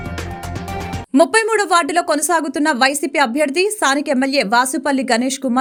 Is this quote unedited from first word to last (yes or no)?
yes